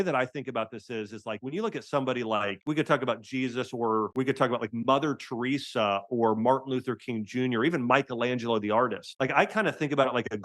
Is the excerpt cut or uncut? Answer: cut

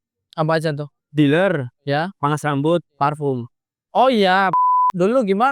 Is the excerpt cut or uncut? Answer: cut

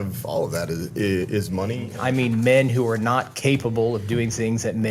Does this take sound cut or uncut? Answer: cut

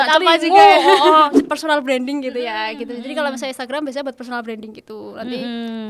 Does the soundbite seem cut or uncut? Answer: cut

